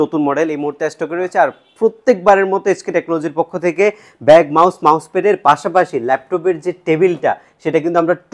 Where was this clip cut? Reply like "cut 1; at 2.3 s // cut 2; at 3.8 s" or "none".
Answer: none